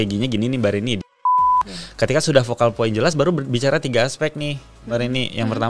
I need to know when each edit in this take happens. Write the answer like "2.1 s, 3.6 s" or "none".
1.3 s